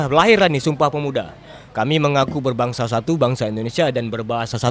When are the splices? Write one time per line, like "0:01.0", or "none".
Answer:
none